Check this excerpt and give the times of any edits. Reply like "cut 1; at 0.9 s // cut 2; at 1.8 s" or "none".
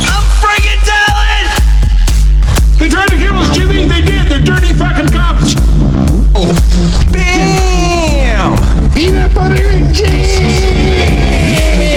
none